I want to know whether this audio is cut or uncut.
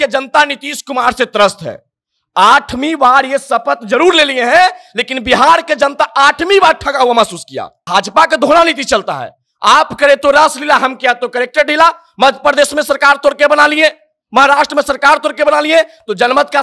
cut